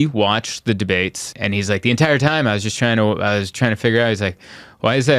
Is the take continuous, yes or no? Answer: no